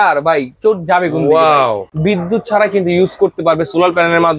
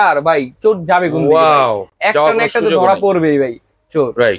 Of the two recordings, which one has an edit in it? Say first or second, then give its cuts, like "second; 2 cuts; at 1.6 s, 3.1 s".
first; 1 cut; at 1.9 s